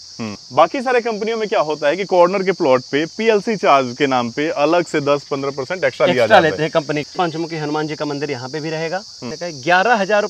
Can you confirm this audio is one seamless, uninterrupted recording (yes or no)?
no